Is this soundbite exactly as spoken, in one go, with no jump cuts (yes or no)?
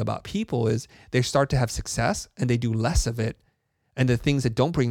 yes